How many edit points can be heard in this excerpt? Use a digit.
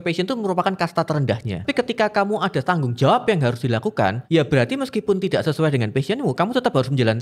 2